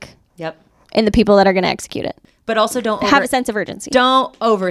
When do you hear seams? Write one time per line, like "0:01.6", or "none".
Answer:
0:02.3